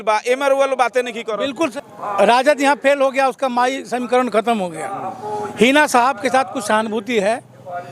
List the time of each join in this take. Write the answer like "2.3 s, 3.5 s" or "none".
1.7 s